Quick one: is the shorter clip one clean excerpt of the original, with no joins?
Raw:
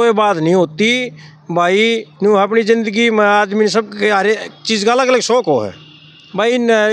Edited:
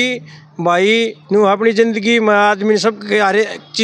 yes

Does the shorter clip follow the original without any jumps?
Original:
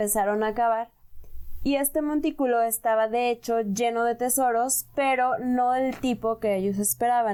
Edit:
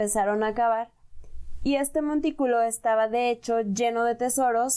yes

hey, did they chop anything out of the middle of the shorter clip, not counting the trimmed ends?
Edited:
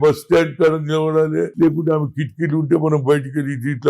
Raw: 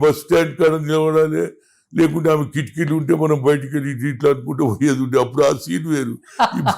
yes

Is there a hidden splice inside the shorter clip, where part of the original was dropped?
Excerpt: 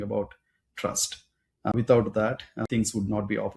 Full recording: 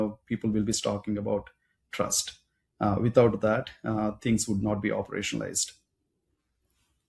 yes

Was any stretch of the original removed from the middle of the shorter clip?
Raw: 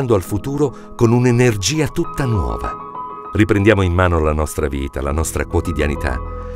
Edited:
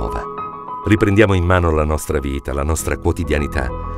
no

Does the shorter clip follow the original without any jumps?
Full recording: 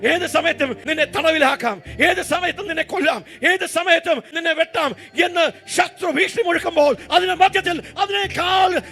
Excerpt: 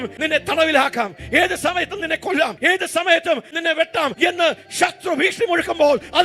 no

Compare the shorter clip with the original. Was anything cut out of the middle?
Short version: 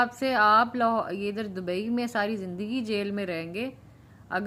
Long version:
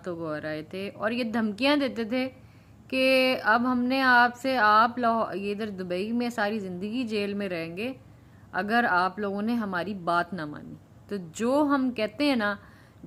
no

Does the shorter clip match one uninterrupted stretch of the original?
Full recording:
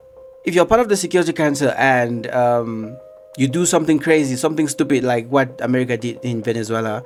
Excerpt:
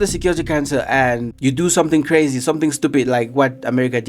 no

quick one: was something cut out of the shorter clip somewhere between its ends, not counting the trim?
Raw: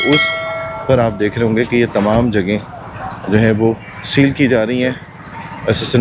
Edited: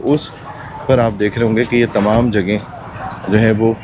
no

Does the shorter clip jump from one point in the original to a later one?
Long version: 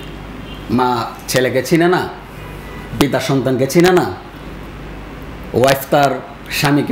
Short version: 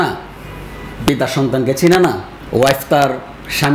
yes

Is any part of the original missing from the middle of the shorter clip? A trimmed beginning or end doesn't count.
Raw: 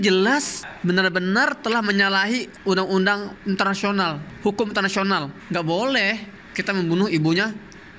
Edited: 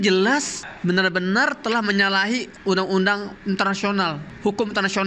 no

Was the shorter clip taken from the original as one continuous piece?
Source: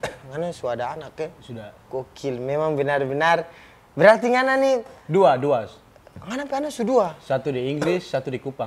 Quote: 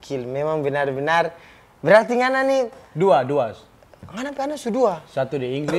yes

